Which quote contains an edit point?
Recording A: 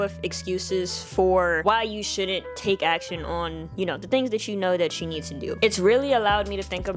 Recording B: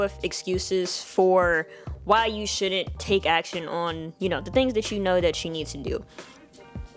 A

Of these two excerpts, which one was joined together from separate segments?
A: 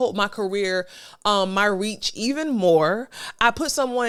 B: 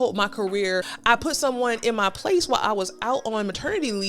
B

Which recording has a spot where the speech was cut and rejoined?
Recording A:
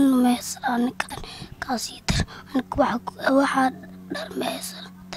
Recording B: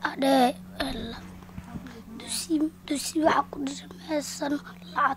A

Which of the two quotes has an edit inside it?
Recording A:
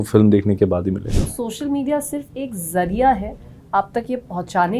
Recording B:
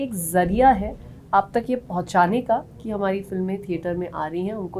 A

